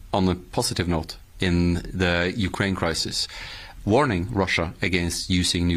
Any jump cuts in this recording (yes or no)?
no